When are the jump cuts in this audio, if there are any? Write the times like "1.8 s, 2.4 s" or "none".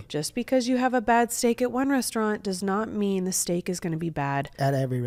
none